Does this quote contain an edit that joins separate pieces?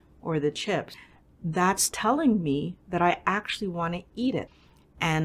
no; 0 cuts

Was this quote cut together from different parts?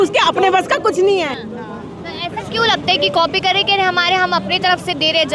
no; 0 cuts

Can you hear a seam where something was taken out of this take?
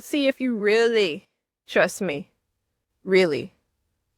no; 0 cuts

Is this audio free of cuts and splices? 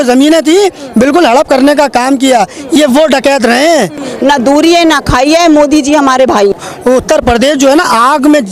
no; 2 cuts; at 4.0 s, 6.5 s

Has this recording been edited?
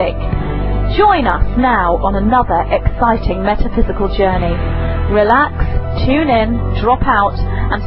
no; 0 cuts

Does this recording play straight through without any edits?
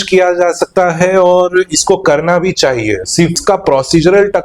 no; 1 cut; at 3.4 s

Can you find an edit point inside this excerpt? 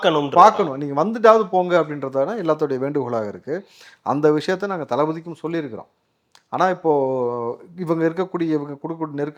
no; 0 cuts

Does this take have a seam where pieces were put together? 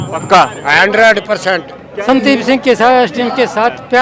yes; 1 cut; at 2.0 s

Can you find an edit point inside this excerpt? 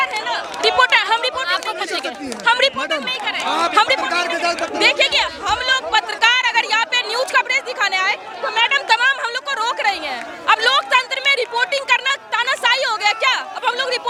no; 0 cuts

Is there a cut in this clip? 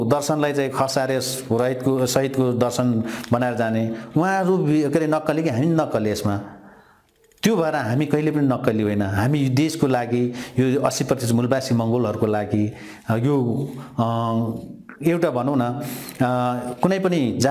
no; 0 cuts

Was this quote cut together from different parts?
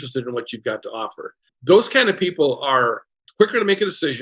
yes; 2 cuts; at 1.5 s, 3.2 s

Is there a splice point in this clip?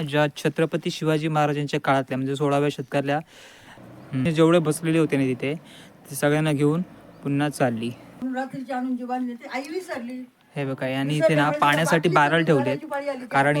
yes; 2 cuts; at 4.1 s, 8.2 s

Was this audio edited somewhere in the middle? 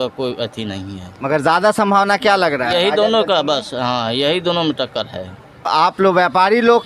yes; 1 cut; at 5.7 s

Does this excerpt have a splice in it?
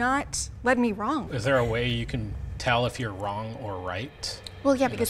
yes; 1 cut; at 1.3 s

